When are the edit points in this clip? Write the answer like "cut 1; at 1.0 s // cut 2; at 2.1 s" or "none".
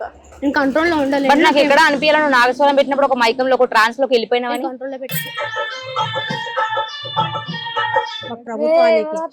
cut 1; at 8.4 s

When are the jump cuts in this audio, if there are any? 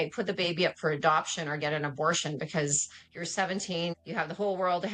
cut 1; at 4.0 s

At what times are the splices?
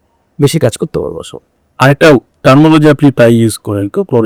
none

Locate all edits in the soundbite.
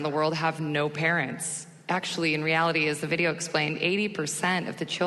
none

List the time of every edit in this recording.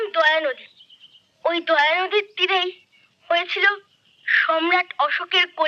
none

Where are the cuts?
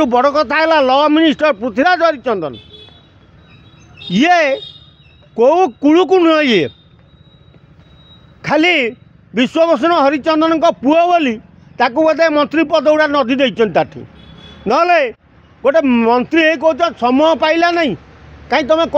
none

